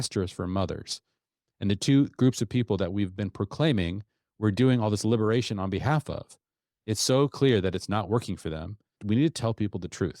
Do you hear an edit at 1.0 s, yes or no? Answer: no